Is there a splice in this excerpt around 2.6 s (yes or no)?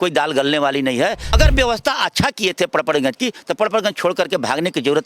no